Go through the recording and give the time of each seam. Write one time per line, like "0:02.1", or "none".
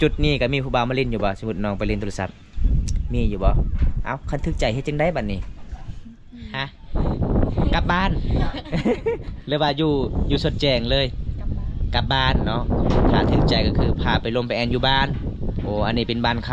none